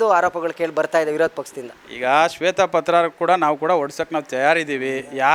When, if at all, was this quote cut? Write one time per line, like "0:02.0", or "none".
none